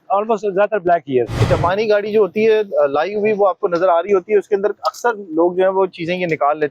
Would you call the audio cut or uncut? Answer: cut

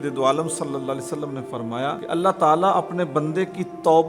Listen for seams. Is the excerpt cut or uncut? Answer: cut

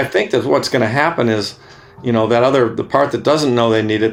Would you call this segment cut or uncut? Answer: uncut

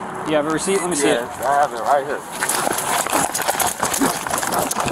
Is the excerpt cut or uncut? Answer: uncut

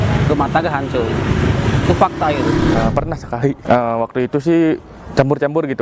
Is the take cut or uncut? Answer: cut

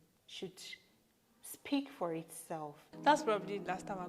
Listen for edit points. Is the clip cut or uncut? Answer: cut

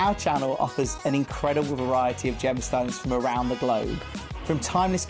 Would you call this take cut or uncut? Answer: uncut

